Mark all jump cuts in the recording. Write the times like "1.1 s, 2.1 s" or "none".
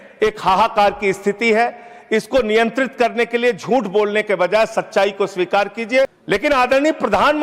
6.2 s

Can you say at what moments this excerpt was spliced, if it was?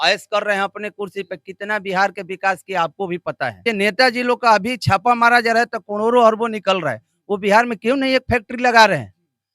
3.6 s

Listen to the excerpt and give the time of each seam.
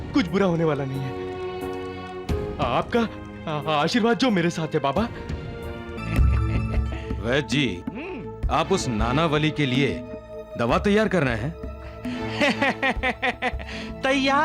6.0 s

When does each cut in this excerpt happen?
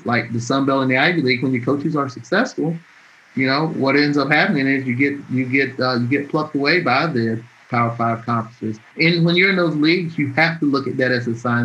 8.9 s

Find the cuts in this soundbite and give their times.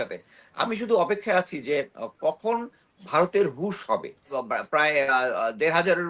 4.4 s

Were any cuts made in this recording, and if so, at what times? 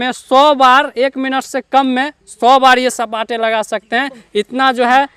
none

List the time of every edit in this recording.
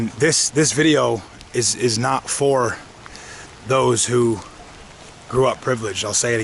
none

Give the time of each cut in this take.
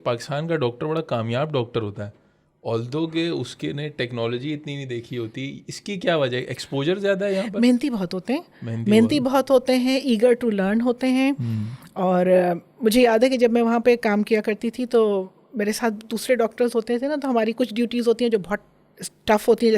none

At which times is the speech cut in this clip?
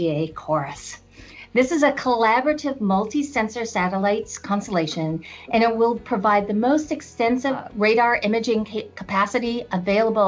none

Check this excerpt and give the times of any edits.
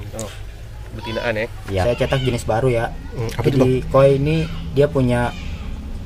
1.8 s

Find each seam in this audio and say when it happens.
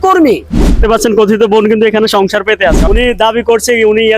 0.8 s, 2.8 s

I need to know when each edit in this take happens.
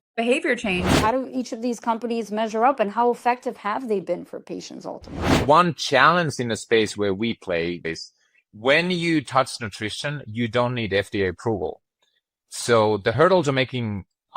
0.9 s, 5.4 s, 7.9 s, 13.1 s

